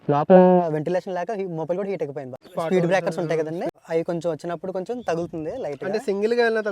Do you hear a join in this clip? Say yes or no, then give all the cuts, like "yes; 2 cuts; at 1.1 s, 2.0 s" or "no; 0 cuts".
yes; 1 cut; at 2.4 s